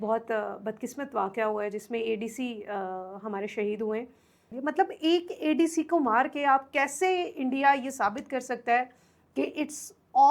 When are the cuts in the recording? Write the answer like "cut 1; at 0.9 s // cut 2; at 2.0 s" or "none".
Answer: cut 1; at 4.5 s